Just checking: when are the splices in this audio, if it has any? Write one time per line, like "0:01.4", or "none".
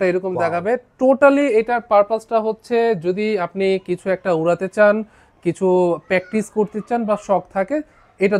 none